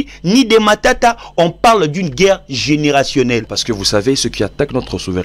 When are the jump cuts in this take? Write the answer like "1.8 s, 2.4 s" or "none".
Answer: 3.5 s